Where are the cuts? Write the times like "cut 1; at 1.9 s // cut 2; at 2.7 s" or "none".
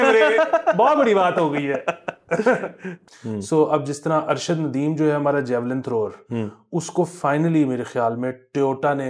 cut 1; at 2.9 s